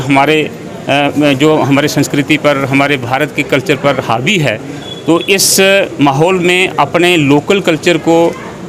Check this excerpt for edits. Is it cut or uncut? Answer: uncut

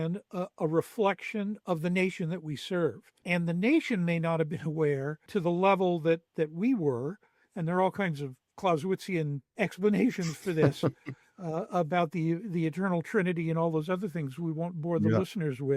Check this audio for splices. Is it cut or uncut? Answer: cut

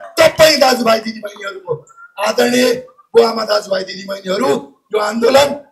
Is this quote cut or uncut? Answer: uncut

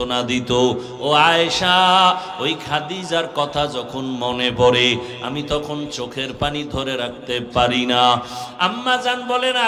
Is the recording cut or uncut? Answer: uncut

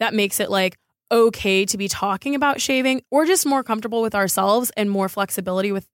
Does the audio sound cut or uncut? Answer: cut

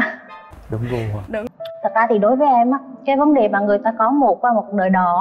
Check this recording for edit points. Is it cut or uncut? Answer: cut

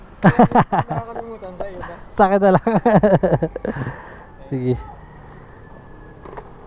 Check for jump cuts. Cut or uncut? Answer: uncut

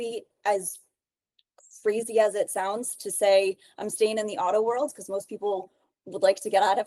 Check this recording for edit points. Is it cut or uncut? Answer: uncut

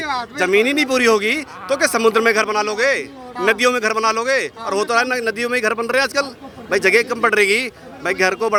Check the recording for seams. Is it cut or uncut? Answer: uncut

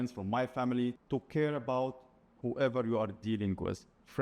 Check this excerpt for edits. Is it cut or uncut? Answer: cut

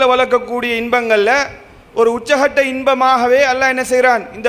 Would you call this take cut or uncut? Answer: uncut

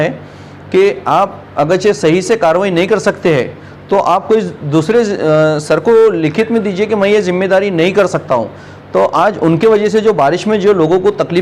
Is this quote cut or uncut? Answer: uncut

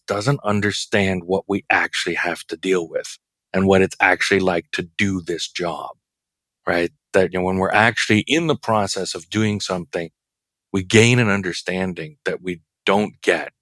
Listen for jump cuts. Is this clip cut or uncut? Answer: uncut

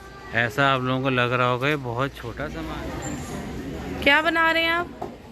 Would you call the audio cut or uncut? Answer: cut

